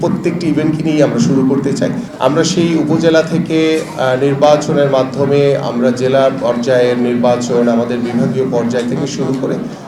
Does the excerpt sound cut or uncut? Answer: cut